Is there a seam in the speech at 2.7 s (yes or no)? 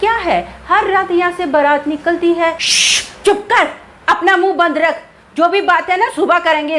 yes